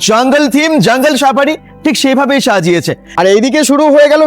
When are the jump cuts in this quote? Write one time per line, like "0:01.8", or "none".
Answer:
0:03.1